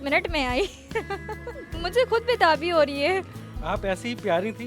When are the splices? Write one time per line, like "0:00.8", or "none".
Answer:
0:03.4